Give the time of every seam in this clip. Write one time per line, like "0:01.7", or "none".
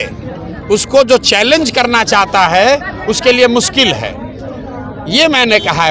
none